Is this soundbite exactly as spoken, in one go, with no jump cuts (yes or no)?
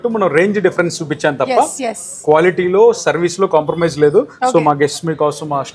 yes